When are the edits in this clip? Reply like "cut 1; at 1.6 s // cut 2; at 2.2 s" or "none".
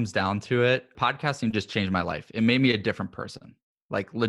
cut 1; at 0.9 s